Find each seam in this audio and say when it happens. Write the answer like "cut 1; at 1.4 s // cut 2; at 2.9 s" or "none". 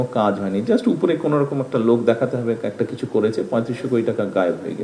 none

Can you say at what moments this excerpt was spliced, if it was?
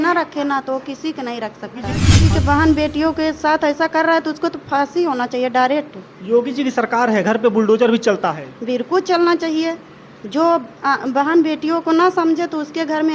cut 1; at 2.1 s

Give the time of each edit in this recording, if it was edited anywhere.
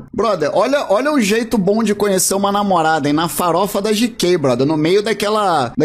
none

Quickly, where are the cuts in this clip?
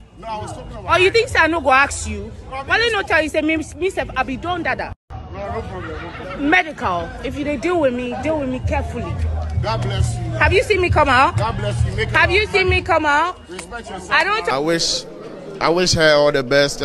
cut 1; at 14.5 s

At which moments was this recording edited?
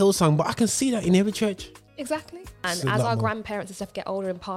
cut 1; at 2.7 s

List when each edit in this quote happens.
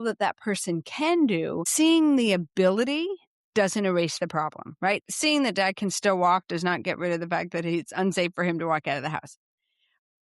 cut 1; at 1.7 s

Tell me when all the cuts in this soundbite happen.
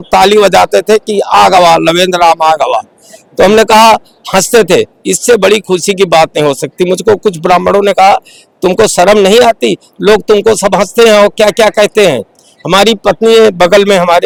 none

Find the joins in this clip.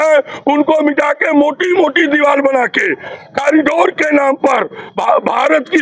none

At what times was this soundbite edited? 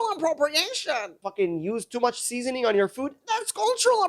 cut 1; at 1.2 s

